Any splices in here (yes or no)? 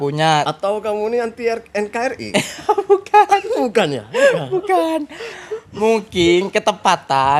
no